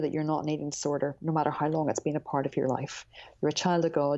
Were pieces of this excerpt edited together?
no; 0 cuts

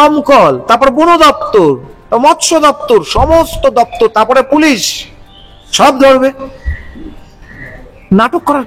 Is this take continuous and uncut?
yes; 0 cuts

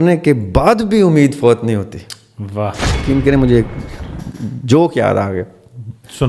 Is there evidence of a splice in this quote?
yes; 1 cut; at 3.0 s

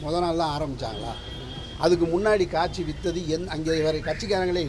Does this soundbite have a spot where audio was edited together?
no; 0 cuts

